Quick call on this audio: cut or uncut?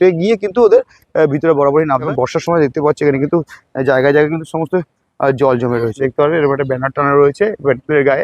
cut